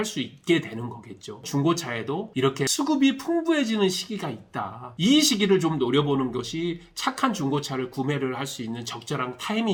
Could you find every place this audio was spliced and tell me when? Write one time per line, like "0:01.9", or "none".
none